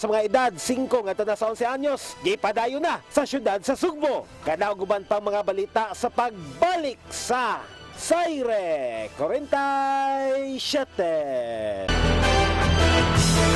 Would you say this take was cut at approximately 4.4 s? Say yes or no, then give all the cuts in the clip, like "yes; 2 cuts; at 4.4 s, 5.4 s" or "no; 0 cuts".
no; 0 cuts